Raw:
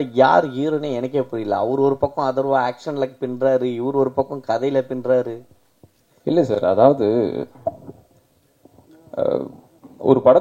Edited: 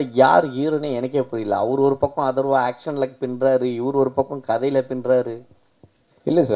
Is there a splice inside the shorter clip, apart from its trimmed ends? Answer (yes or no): no